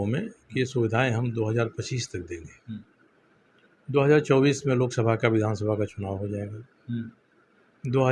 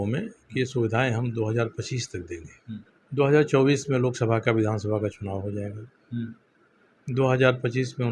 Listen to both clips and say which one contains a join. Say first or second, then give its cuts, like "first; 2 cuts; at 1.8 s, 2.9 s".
second; 1 cut; at 3.0 s